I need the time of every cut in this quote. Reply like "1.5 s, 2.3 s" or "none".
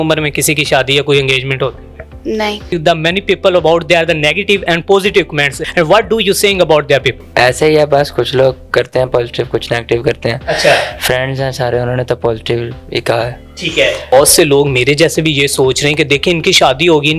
2.7 s, 5.6 s, 7.2 s, 14.1 s